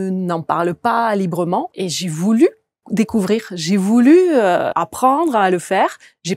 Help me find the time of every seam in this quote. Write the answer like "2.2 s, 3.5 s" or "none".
1.7 s, 2.8 s, 4.7 s